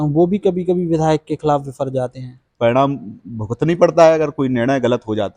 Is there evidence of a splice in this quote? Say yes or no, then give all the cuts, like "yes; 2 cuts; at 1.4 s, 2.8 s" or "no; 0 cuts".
yes; 1 cut; at 2.5 s